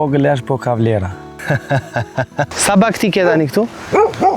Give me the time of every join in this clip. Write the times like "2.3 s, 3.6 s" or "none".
1.3 s, 2.5 s

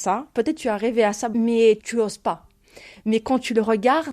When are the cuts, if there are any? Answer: 1.3 s

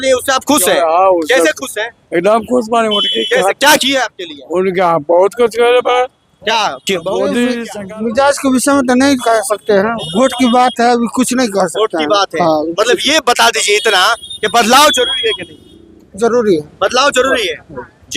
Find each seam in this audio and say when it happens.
7.6 s

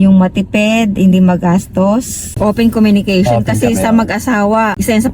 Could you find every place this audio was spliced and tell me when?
2.3 s

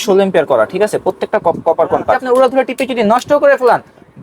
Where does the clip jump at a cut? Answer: 2.2 s

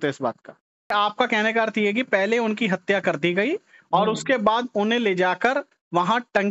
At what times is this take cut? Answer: 0.9 s

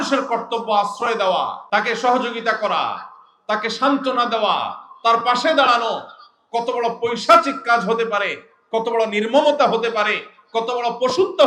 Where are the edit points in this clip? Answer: 1.6 s

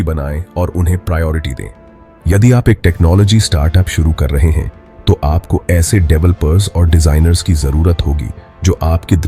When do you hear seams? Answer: 2.1 s

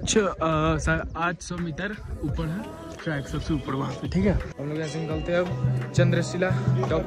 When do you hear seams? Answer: 4.5 s

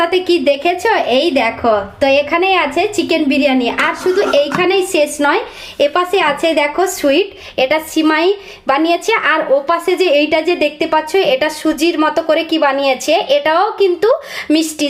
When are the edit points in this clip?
none

